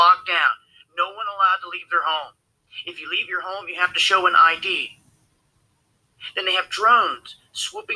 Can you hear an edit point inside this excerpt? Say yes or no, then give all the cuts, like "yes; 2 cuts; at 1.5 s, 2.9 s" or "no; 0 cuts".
no; 0 cuts